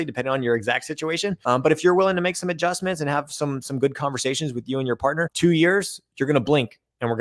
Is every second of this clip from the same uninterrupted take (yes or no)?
no